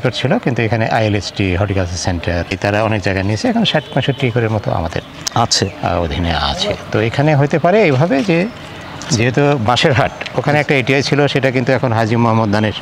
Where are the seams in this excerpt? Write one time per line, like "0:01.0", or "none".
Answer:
0:02.5